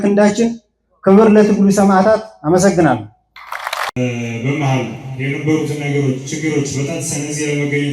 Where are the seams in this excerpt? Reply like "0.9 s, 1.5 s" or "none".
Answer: 3.9 s